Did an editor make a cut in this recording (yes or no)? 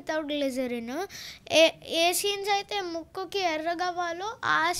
no